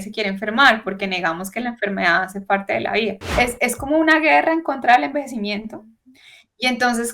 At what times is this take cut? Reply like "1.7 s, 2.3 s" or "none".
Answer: 3.2 s